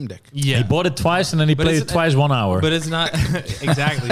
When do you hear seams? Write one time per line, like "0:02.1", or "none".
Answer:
none